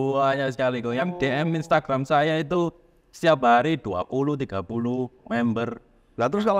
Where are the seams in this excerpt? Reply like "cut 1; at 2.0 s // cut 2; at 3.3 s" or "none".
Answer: none